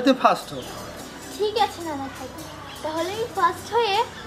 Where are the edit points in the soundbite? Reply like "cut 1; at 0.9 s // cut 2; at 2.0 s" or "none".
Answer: none